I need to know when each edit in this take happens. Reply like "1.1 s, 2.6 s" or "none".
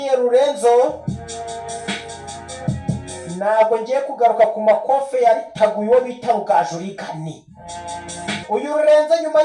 8.4 s